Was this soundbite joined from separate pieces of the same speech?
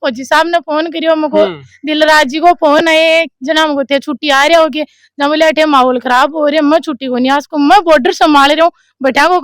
no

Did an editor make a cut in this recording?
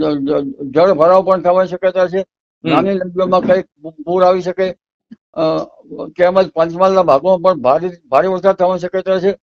no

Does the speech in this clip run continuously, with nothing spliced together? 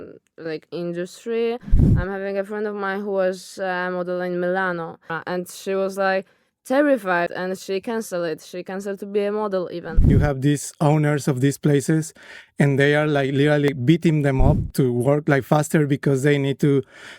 no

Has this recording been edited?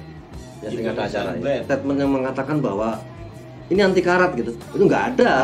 yes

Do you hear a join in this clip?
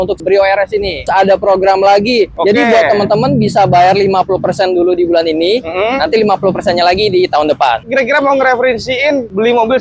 yes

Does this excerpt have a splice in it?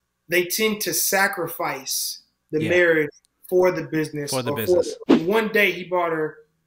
yes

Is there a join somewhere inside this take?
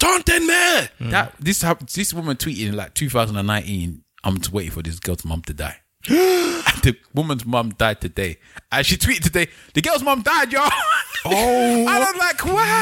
no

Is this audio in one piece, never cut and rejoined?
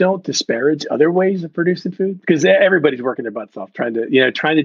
yes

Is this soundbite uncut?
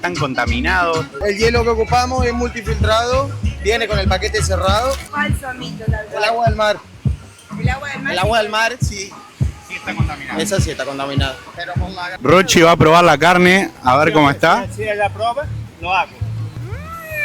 no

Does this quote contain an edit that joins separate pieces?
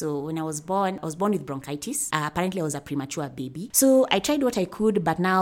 yes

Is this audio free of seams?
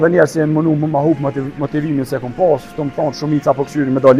yes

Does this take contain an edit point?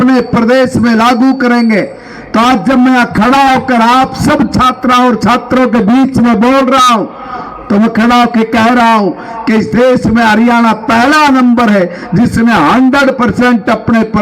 no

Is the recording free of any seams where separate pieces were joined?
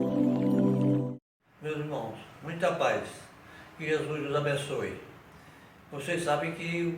no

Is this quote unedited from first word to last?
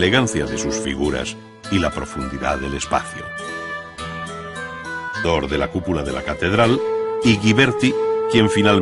yes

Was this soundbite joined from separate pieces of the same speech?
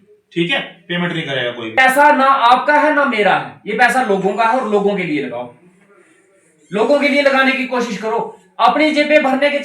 yes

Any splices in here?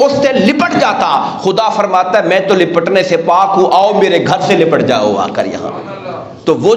no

